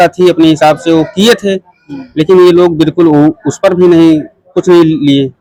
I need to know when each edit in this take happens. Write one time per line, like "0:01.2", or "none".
none